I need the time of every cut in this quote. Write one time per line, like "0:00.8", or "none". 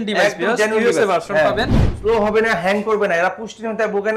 0:01.8